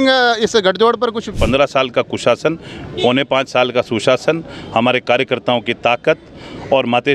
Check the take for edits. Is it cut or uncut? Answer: cut